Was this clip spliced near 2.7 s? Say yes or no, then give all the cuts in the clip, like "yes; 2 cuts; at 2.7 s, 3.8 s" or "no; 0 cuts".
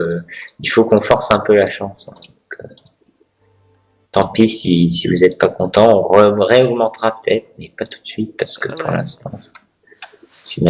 no; 1 cut; at 9.7 s